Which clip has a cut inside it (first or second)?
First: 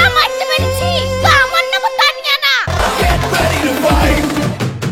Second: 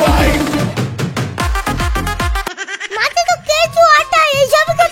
second